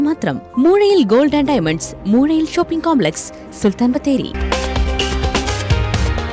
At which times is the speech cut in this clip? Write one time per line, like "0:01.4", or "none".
none